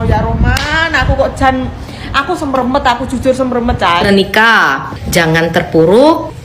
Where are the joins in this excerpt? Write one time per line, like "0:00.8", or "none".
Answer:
0:04.0